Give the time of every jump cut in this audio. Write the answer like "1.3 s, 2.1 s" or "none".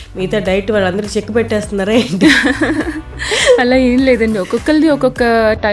none